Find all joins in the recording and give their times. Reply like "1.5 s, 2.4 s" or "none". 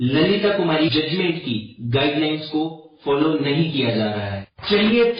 none